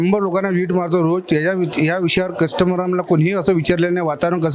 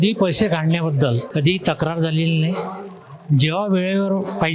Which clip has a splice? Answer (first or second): second